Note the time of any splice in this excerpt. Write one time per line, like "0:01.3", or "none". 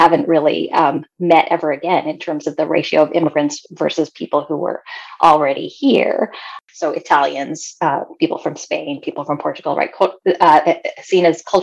0:06.6